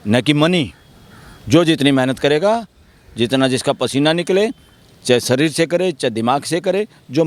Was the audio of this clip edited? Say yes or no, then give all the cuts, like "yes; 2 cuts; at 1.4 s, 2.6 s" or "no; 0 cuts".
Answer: no; 0 cuts